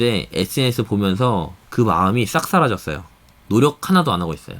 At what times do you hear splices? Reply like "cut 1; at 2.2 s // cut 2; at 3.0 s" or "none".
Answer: cut 1; at 1.6 s